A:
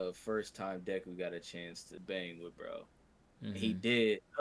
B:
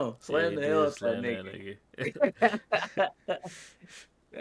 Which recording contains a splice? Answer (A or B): A